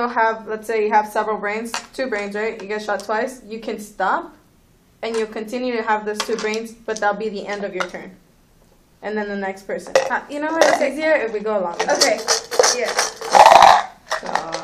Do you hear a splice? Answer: yes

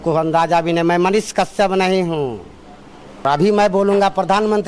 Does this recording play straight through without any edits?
no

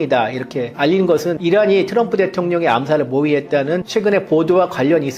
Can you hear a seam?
yes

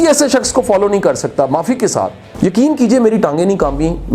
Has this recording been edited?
yes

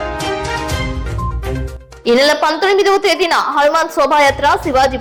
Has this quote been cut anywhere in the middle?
no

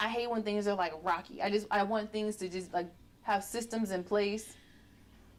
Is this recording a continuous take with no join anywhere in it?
yes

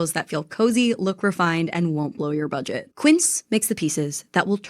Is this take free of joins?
no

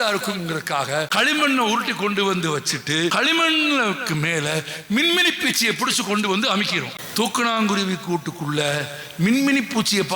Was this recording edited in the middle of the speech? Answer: yes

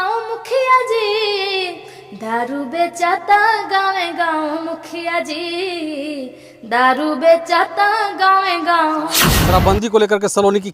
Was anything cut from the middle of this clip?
yes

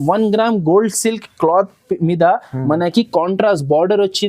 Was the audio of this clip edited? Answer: no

